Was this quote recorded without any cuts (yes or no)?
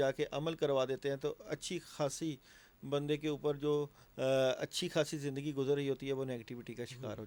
yes